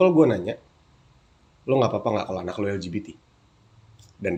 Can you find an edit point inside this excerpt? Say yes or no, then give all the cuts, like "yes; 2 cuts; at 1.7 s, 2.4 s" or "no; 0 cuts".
no; 0 cuts